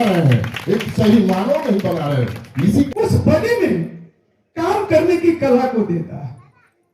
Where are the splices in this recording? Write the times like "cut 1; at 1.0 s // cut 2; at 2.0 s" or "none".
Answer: cut 1; at 2.9 s